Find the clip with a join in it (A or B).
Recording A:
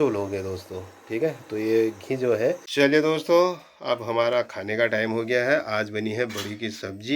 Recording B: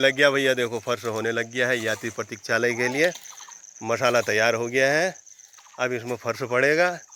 A